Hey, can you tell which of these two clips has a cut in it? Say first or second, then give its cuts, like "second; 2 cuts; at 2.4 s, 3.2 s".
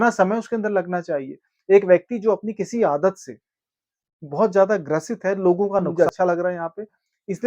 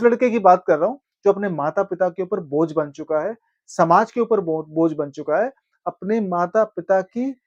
first; 1 cut; at 5.9 s